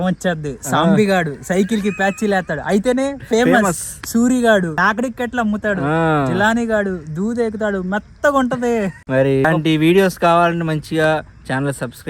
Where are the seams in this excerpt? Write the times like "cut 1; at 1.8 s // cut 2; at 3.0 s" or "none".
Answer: cut 1; at 4.8 s // cut 2; at 9.5 s